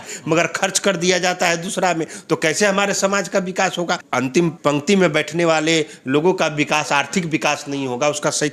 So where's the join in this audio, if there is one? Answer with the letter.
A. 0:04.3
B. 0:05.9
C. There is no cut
A